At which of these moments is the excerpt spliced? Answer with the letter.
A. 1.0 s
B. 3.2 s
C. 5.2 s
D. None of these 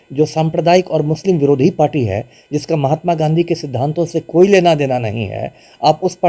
D